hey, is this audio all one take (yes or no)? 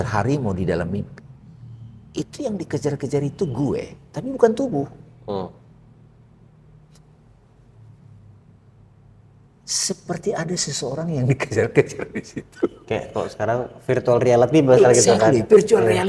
yes